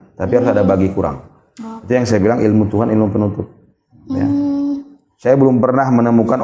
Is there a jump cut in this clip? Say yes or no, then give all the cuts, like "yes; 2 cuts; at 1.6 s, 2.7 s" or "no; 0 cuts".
no; 0 cuts